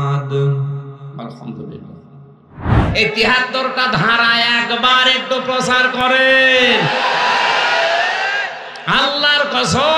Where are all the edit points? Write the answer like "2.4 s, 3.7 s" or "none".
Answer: 2.7 s